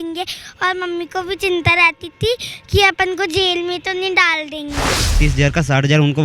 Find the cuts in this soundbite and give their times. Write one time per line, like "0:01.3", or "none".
0:05.2